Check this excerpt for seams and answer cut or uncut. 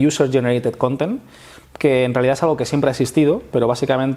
uncut